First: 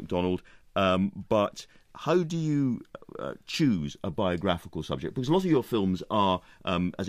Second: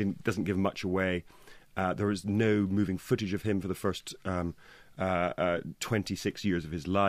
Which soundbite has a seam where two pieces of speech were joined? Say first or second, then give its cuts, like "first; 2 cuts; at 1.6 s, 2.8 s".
second; 1 cut; at 3.2 s